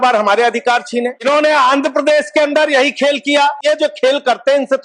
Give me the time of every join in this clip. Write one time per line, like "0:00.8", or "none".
0:01.2
0:03.6